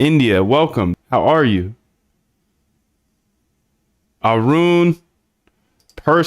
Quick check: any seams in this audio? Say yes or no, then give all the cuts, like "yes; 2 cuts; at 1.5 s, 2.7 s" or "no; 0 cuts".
yes; 1 cut; at 0.9 s